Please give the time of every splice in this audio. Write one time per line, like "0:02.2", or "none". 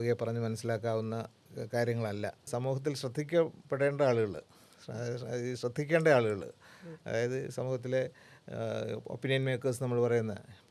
0:02.5

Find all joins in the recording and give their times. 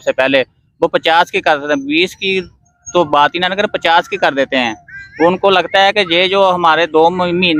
none

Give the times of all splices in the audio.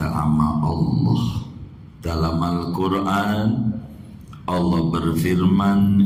none

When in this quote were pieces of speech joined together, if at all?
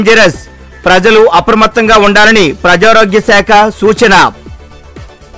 none

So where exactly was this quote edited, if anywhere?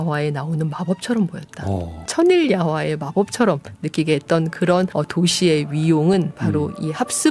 0:02.1
0:04.9

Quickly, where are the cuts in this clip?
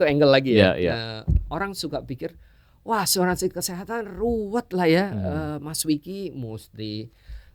none

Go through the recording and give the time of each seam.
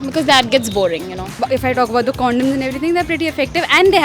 0:01.4

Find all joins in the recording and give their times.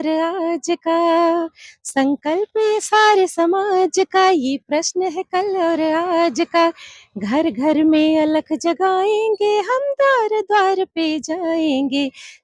none

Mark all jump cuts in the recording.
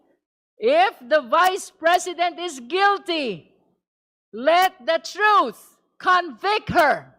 none

